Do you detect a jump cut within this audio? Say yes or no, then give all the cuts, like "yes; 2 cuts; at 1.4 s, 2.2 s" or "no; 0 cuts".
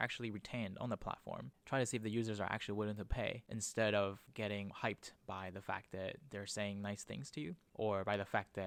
no; 0 cuts